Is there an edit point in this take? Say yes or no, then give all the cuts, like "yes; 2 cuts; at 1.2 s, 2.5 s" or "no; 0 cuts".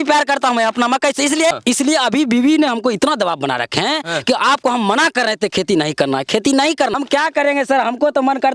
yes; 2 cuts; at 1.5 s, 6.9 s